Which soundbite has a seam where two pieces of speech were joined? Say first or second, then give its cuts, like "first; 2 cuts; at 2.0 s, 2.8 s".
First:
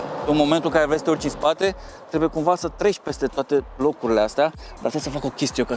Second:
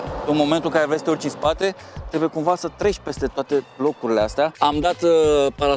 second; 1 cut; at 4.5 s